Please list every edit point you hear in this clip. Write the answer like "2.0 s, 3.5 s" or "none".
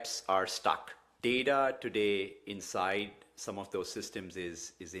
1.1 s